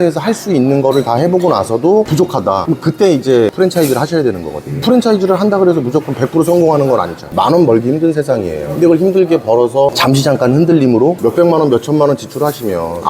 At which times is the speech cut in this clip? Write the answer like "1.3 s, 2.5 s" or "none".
3.5 s, 7.3 s, 11.2 s